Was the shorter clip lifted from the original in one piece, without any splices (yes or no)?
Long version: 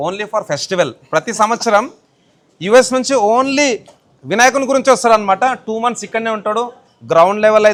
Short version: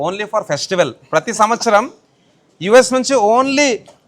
yes